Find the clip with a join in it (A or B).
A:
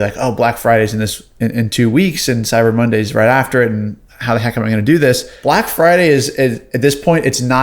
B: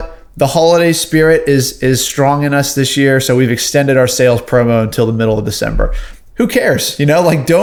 A